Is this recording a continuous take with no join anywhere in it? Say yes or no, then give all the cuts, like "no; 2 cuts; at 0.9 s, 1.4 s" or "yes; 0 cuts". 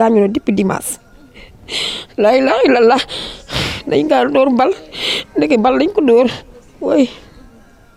yes; 0 cuts